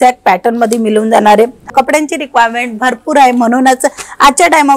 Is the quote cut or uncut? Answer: cut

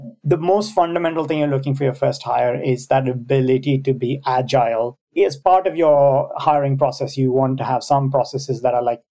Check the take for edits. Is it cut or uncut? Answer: cut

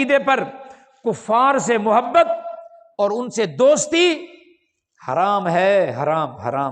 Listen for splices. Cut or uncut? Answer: uncut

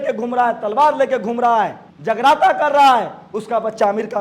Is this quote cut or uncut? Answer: cut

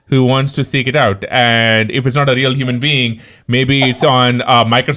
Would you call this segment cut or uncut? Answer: uncut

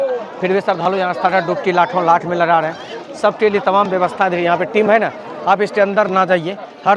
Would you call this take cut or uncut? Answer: uncut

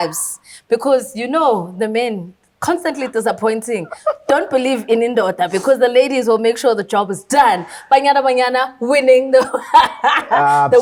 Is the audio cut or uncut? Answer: uncut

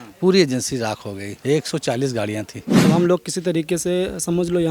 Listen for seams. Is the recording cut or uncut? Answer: cut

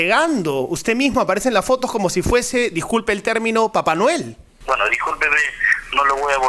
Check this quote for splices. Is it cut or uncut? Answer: cut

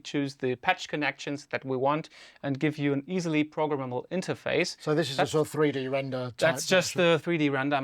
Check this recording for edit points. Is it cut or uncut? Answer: uncut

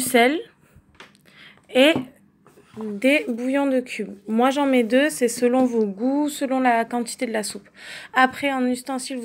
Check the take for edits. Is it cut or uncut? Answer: uncut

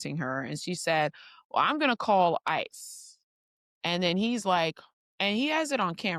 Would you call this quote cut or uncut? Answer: uncut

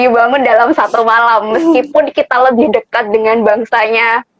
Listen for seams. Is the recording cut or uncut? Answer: uncut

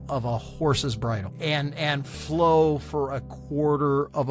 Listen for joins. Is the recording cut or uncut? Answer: cut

